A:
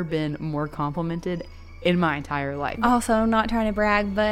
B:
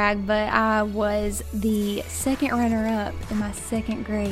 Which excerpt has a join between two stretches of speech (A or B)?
A